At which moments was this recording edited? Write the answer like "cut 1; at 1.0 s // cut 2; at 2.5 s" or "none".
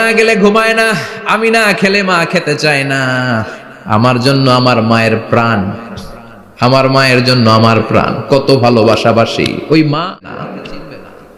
cut 1; at 10.2 s